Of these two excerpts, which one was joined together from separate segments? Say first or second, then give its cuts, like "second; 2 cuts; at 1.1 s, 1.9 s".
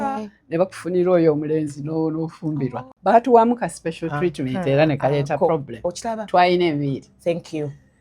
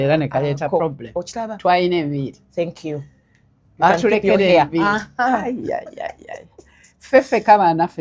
first; 1 cut; at 2.9 s